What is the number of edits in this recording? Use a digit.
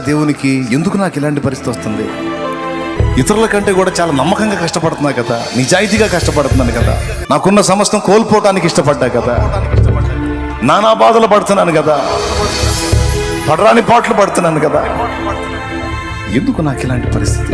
0